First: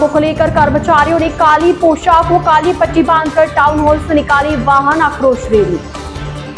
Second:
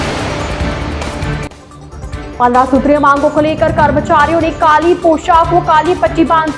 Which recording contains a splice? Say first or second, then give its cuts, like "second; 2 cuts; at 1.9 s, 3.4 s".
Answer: second; 1 cut; at 2.3 s